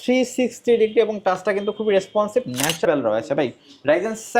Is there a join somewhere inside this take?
yes; 1 cut; at 2.9 s

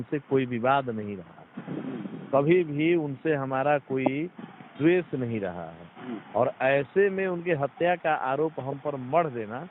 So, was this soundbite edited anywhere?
no; 0 cuts

